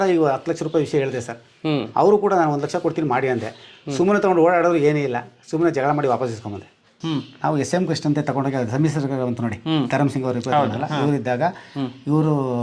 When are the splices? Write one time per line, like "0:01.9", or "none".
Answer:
0:07.0